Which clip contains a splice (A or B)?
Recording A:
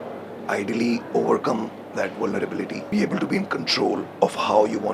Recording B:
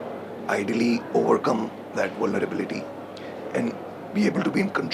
A